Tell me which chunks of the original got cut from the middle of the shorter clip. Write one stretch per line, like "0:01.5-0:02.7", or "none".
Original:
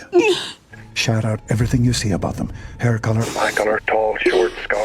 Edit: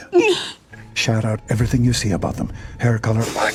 none